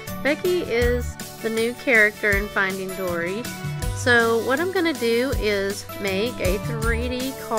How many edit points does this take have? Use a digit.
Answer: 1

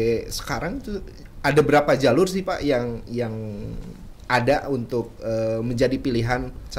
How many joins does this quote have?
0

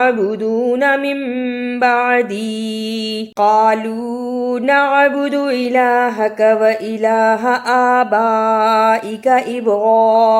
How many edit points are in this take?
1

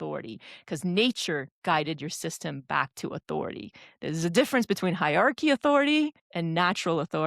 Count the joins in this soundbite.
1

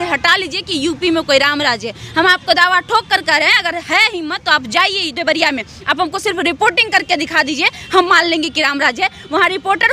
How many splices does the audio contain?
0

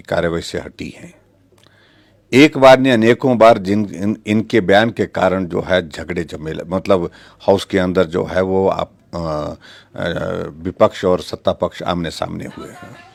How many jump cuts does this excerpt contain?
0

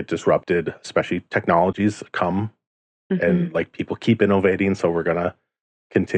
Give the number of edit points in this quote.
0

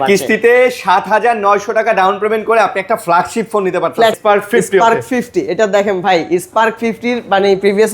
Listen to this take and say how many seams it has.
1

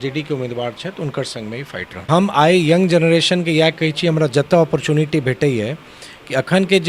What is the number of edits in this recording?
1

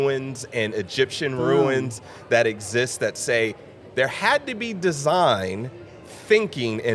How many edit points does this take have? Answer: 0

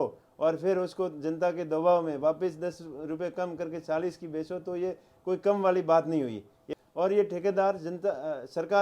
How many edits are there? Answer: 1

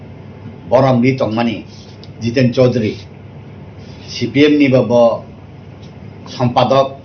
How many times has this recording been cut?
1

